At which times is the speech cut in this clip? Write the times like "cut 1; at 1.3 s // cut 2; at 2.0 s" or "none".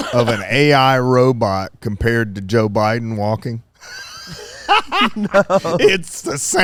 none

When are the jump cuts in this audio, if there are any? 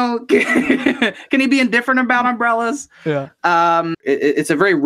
cut 1; at 3.9 s

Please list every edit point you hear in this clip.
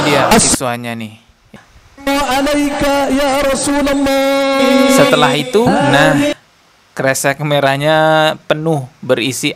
cut 1; at 1.6 s

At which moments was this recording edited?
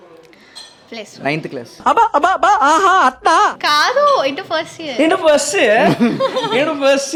none

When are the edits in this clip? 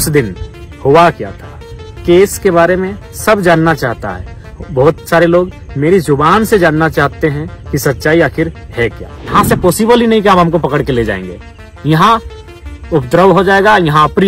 cut 1; at 9.2 s

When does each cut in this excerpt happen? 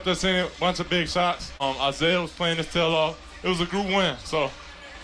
cut 1; at 1.6 s

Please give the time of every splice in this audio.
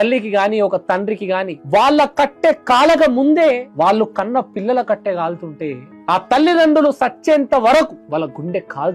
cut 1; at 4.3 s

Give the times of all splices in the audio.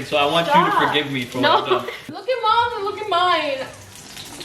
cut 1; at 2.1 s

